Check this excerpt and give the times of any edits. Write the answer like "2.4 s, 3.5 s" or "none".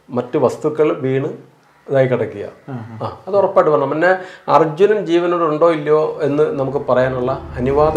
none